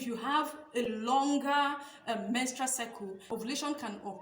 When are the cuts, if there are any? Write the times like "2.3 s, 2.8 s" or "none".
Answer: 3.3 s